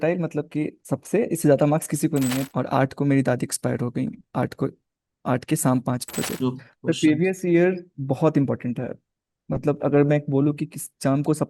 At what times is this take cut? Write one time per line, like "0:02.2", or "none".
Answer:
0:02.5
0:06.4